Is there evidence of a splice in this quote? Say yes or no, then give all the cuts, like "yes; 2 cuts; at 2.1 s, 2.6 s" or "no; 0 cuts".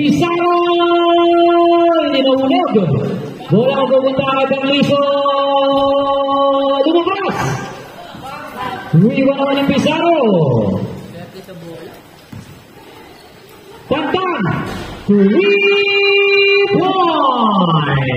no; 0 cuts